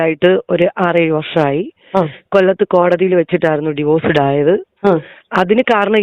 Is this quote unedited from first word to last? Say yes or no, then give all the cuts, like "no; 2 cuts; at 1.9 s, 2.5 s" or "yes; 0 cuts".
no; 1 cut; at 5.1 s